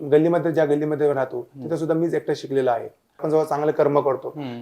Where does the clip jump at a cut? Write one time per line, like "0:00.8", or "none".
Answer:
0:03.2